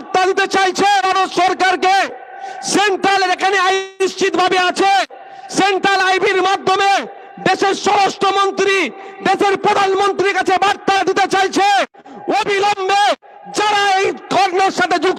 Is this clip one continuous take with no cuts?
yes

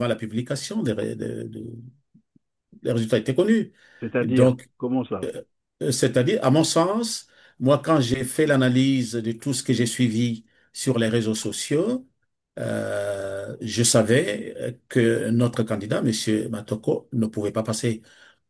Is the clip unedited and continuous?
yes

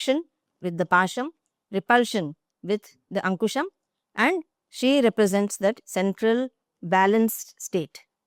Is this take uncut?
yes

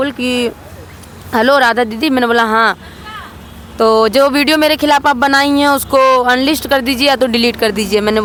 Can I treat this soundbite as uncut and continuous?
yes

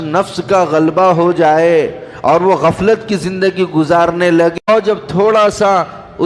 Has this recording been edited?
yes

